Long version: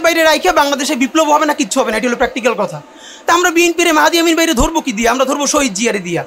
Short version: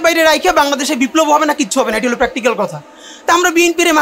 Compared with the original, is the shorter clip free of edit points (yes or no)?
yes